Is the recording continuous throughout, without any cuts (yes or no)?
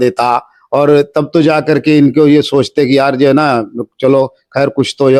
yes